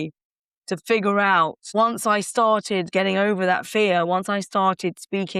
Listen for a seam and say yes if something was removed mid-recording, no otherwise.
yes